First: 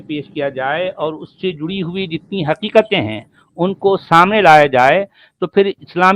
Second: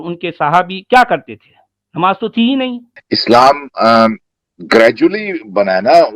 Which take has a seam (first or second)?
second